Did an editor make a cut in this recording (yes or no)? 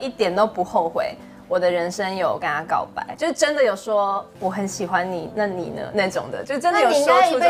yes